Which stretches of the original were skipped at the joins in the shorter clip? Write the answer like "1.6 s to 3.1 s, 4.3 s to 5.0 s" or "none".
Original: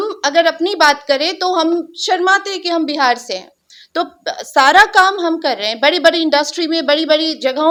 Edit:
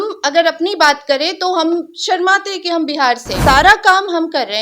3.3 s to 4.4 s